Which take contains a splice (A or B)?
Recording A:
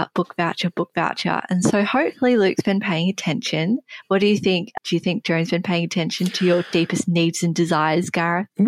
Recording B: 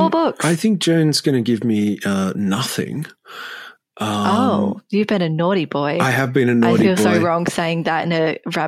A